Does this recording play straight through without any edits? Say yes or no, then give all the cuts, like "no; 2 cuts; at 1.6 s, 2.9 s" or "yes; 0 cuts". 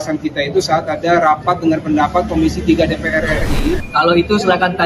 no; 1 cut; at 3.7 s